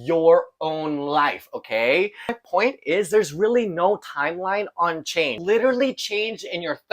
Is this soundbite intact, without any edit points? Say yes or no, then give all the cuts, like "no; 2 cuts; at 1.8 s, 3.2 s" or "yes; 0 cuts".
no; 2 cuts; at 2.2 s, 5.4 s